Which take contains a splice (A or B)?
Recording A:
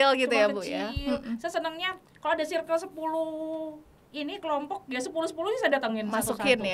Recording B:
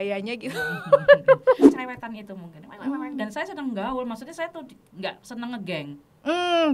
B